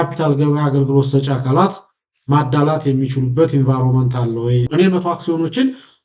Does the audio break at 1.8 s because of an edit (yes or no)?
no